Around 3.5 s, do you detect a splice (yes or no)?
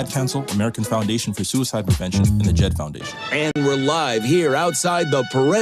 yes